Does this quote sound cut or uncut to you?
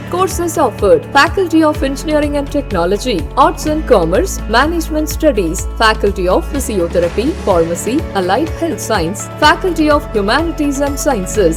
uncut